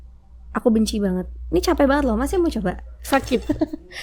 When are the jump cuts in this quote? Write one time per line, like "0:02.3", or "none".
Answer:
none